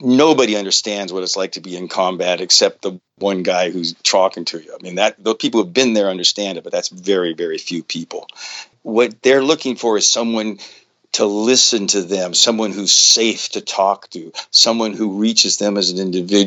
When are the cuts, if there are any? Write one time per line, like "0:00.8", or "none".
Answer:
0:08.7